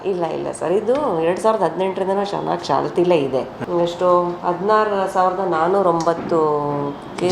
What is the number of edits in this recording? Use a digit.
1